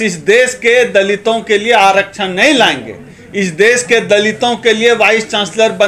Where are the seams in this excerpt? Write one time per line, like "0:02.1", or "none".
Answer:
none

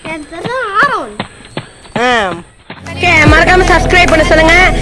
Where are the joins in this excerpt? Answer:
0:02.8

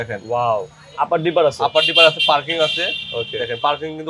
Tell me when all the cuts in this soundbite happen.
0:00.9

